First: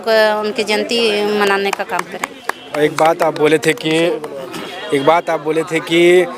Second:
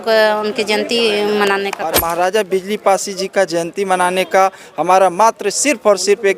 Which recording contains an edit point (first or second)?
second